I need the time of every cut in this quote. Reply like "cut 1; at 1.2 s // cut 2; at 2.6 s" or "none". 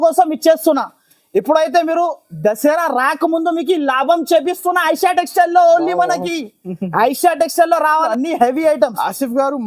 cut 1; at 8.1 s